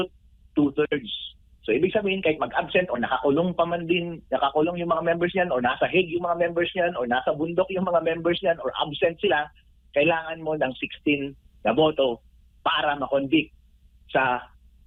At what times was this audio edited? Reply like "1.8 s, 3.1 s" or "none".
none